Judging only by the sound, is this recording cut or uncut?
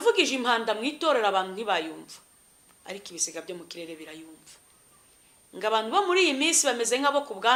uncut